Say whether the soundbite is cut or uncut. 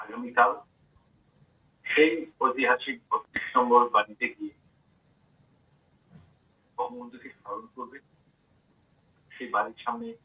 uncut